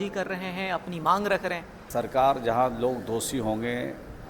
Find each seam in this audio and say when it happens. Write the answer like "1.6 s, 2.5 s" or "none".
1.7 s